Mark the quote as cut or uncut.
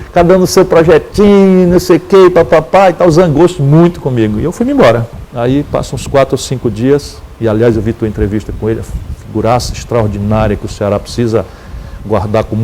uncut